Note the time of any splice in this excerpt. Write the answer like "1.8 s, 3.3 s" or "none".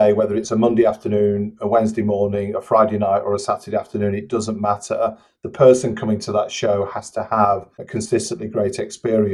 7.8 s